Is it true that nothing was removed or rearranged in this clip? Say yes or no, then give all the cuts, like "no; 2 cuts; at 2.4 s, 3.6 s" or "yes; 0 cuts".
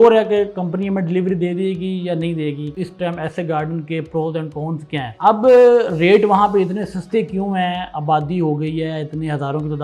no; 2 cuts; at 2.7 s, 5.0 s